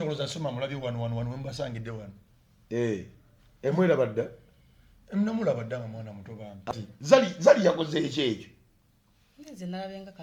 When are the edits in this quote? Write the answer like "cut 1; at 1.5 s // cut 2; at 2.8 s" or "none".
cut 1; at 6.7 s

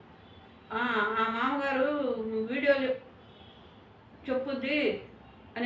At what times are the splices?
none

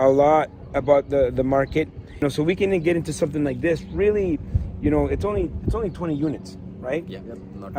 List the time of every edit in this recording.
cut 1; at 2.0 s

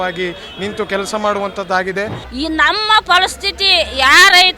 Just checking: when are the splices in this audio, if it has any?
cut 1; at 2.2 s

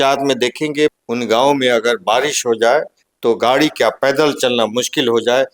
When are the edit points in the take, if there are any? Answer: cut 1; at 0.9 s

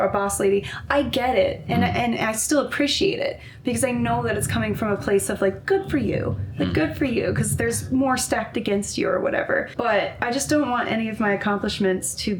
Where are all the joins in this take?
cut 1; at 9.7 s

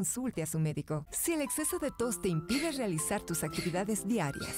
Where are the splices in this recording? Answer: cut 1; at 1.0 s

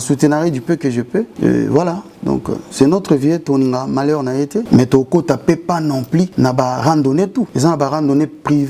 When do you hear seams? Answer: cut 1; at 1.3 s // cut 2; at 4.6 s // cut 3; at 6.3 s // cut 4; at 7.5 s

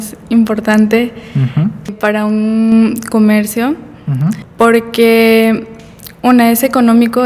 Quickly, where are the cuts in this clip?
cut 1; at 1.9 s // cut 2; at 4.4 s

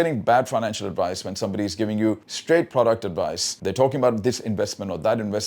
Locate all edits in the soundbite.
cut 1; at 2.3 s

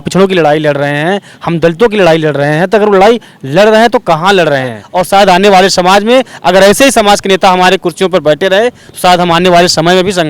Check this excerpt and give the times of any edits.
cut 1; at 4.9 s

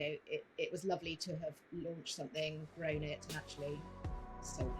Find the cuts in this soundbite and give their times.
none

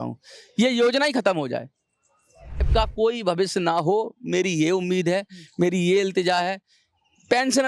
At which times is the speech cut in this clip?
cut 1; at 2.6 s

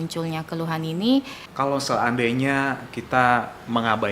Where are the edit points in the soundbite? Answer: cut 1; at 1.4 s

